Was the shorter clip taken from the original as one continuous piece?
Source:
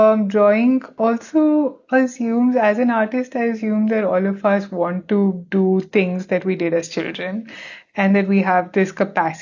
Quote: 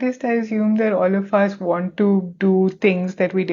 yes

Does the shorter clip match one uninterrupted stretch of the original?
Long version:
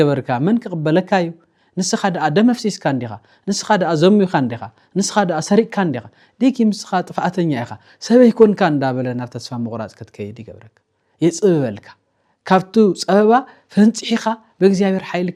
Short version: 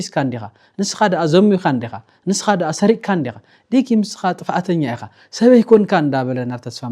yes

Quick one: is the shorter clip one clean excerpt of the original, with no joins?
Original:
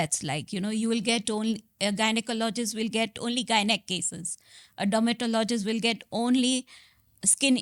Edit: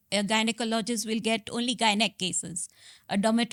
yes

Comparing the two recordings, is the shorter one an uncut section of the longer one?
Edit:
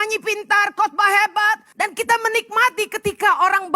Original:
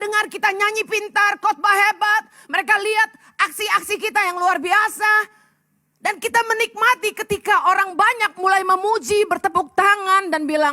no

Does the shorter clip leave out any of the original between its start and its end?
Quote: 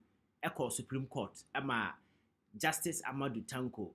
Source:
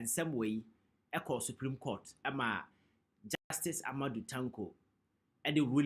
yes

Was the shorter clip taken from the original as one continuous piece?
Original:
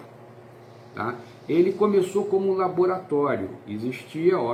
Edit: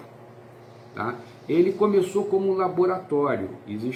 yes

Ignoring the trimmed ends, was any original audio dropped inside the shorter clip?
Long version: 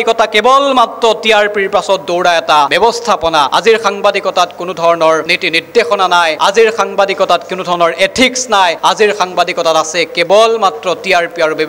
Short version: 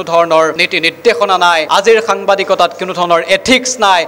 no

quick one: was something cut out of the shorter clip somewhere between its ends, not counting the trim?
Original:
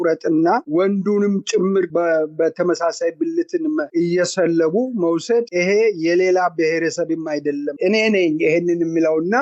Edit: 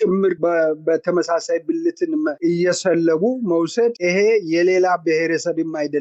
no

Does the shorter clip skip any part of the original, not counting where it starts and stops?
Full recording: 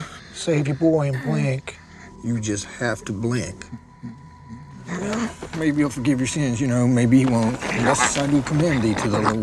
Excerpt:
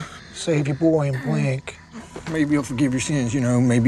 yes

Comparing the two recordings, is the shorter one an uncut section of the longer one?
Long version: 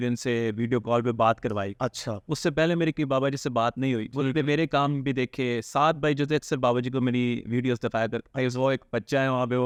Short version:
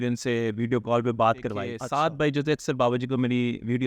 no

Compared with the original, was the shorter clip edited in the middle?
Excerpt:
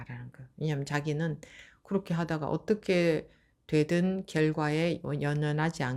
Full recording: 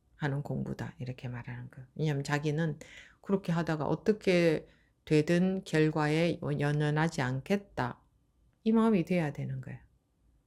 no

